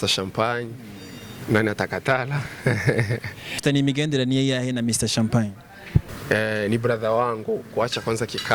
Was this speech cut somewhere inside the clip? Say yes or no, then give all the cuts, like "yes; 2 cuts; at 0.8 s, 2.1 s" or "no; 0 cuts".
yes; 2 cuts; at 3.6 s, 6.1 s